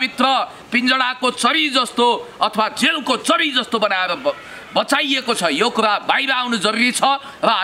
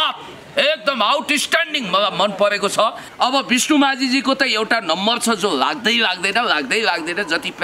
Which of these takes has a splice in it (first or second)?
second